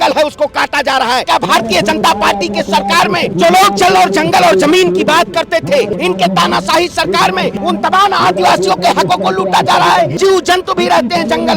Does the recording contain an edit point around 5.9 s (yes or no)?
yes